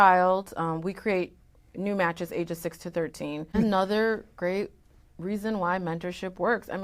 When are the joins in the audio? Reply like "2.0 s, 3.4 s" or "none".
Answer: 3.6 s